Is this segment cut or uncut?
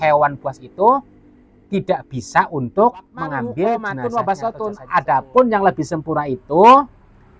cut